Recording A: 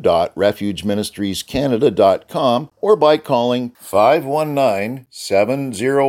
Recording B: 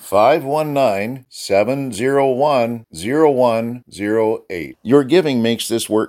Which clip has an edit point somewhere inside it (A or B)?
A